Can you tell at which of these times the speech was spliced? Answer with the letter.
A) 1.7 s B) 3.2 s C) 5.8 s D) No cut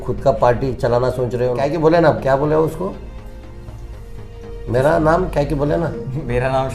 A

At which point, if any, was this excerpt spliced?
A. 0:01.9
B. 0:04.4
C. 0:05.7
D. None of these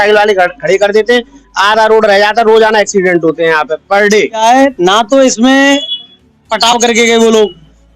B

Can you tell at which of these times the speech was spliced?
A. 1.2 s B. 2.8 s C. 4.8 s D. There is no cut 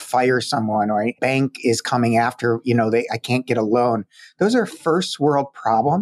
A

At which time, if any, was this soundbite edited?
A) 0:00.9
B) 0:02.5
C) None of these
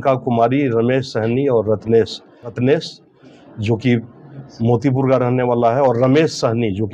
B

